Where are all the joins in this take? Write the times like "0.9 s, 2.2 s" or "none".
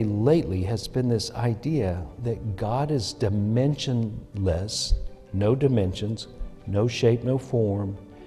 none

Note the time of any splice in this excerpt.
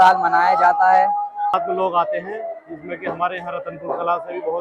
1.5 s

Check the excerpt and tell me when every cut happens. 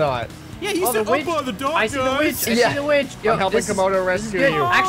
3.1 s

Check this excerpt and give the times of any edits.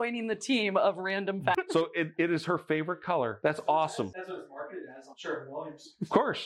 1.5 s, 3.3 s, 4.1 s

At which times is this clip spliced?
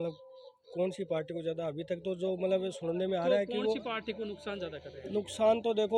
none

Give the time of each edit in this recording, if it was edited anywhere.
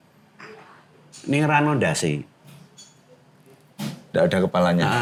none

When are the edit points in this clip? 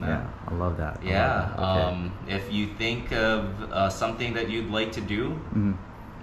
none

